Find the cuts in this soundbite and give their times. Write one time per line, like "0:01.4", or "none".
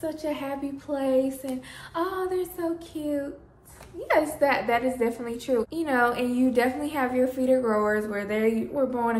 none